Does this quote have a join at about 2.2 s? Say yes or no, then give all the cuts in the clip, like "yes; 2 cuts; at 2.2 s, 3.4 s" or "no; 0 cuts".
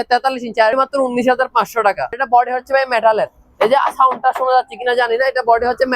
yes; 2 cuts; at 0.7 s, 2.2 s